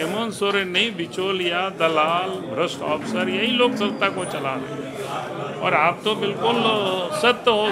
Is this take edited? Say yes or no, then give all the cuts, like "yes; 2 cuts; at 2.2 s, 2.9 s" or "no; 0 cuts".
no; 0 cuts